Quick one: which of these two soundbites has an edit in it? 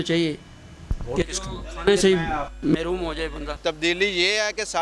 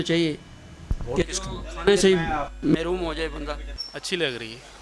first; 1 cut; at 3.6 s

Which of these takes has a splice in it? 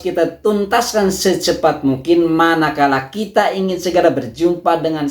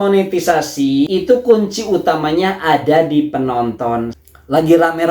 second; 2 cuts; at 1.1 s, 4.2 s

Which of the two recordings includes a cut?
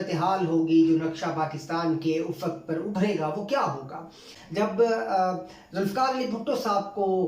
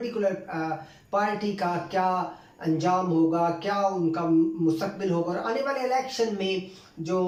first; 1 cut; at 4.3 s

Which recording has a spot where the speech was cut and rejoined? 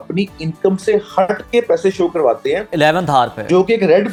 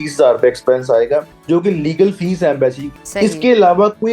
second; 2 cuts; at 1.3 s, 2.8 s

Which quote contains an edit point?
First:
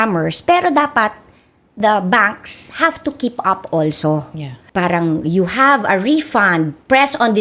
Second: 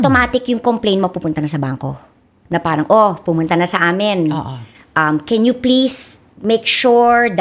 first; 1 cut; at 4.6 s

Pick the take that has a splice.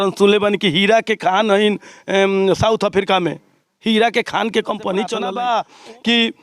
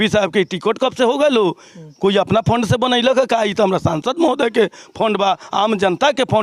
first; 1 cut; at 5.2 s

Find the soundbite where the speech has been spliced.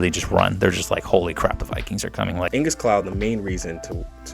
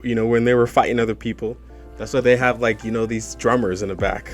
first; 1 cut; at 2.5 s

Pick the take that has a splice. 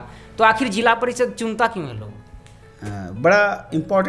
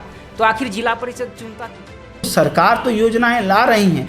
second; 1 cut; at 2.3 s

